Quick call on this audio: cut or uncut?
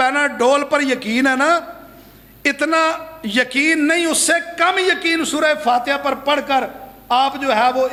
uncut